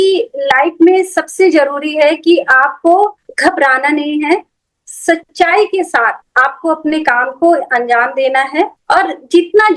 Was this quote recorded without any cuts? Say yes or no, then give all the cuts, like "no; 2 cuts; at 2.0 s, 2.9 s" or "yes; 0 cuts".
yes; 0 cuts